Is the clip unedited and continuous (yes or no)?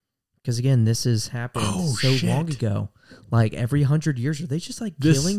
yes